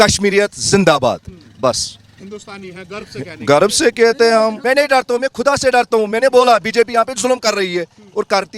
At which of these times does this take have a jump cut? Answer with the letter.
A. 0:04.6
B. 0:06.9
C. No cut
A